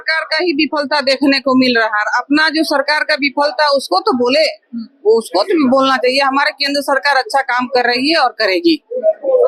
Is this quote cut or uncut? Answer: uncut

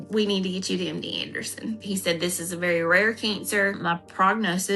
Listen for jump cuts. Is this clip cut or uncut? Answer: cut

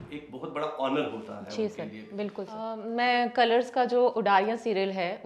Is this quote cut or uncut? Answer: cut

